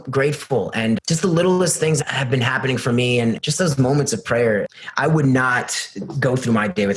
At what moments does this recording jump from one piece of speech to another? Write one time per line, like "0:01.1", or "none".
0:01.0
0:02.0
0:03.4
0:04.7